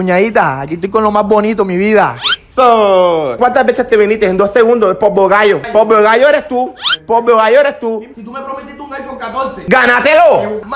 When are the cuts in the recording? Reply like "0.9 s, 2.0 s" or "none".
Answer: 3.3 s, 5.6 s, 8.1 s